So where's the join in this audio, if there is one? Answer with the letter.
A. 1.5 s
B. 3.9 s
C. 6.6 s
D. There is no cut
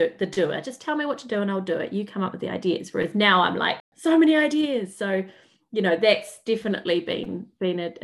B